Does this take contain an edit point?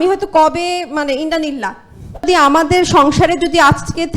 yes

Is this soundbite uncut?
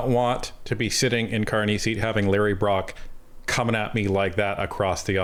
yes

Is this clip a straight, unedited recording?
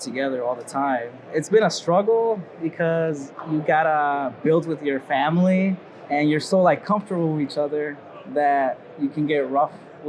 no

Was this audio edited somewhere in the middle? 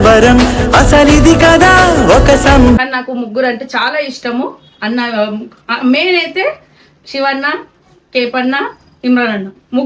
yes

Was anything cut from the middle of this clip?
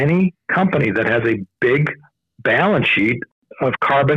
yes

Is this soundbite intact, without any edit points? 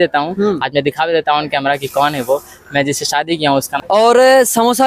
no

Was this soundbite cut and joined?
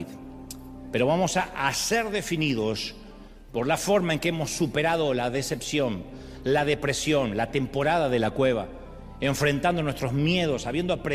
no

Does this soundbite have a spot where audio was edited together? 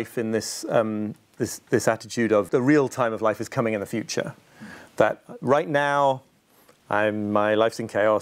yes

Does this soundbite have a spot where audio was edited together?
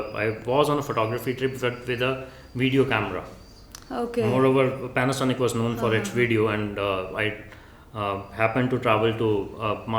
no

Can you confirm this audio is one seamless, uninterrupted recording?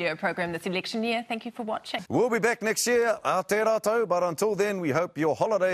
no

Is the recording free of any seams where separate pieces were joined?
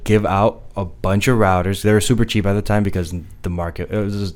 yes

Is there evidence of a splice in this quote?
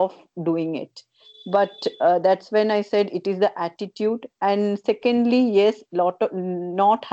no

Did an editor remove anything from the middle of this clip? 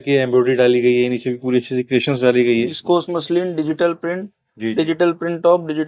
yes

